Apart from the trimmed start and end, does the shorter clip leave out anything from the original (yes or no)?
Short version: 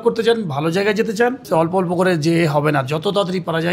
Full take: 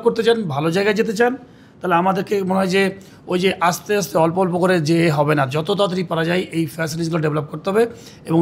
yes